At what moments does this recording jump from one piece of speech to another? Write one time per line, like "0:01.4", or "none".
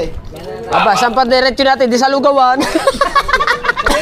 none